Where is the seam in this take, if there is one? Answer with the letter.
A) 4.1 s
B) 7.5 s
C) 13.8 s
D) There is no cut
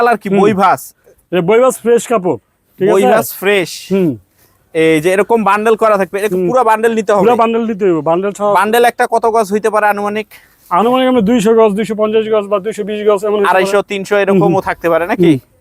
D